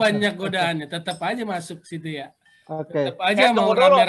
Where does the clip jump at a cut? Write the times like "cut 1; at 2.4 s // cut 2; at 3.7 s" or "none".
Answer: none